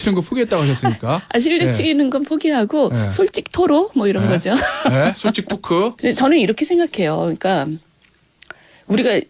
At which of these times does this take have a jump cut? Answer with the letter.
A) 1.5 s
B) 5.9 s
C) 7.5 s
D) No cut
B